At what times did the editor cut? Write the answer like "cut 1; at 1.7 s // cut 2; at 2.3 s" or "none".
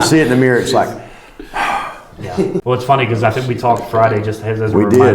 cut 1; at 2.6 s